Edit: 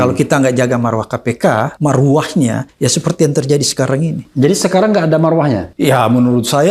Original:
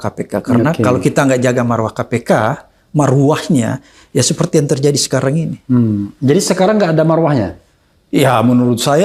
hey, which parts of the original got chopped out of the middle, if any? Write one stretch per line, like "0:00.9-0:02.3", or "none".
0:02.6-0:02.9
0:03.8-0:04.0
0:05.6-0:06.1
0:07.5-0:08.0